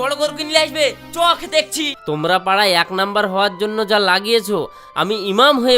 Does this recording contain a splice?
yes; 1 cut; at 1.9 s

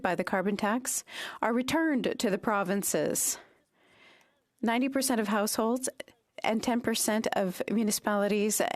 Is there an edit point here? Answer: no; 0 cuts

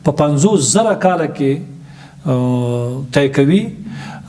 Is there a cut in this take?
no; 0 cuts

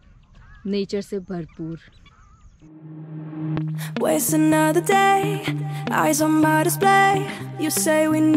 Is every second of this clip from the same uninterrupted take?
no; 1 cut; at 2.7 s

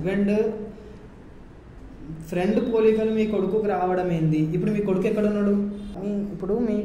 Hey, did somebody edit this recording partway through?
yes; 1 cut; at 6.0 s

